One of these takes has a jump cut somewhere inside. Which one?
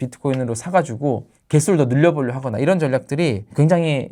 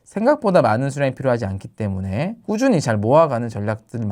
second; 1 cut; at 2.4 s

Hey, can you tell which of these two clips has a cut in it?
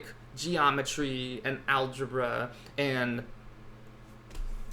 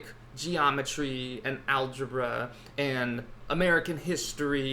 second; 1 cut; at 3.4 s

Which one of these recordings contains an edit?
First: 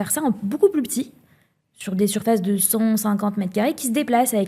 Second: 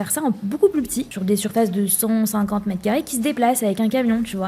second; 1 cut; at 1.1 s

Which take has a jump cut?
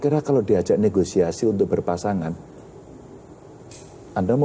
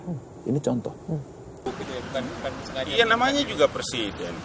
second; 1 cut; at 1.6 s

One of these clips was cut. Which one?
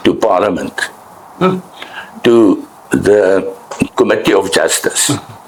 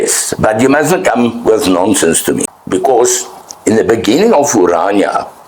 second; 1 cut; at 2.5 s

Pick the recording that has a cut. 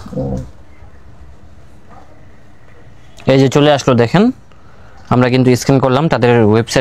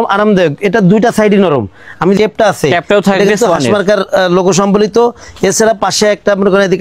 second; 1 cut; at 2.2 s

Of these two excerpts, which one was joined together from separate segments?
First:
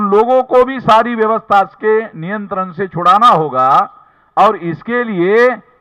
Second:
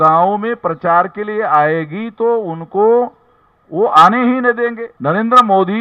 second; 1 cut; at 4.9 s

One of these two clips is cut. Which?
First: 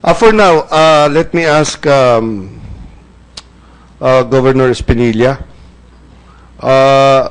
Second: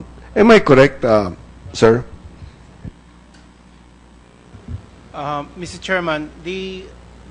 second; 1 cut; at 3.1 s

